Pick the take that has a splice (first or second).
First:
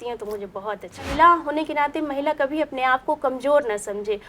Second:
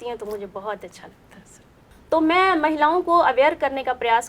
first